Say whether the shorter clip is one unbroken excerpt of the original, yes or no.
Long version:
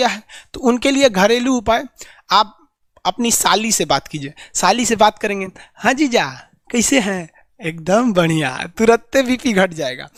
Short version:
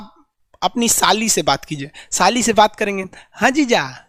yes